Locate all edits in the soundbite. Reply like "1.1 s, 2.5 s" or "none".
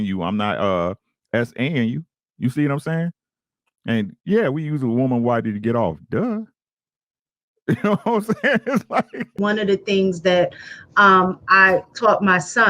9.4 s